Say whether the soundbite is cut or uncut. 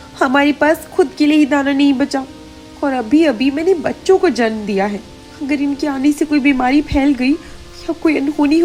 uncut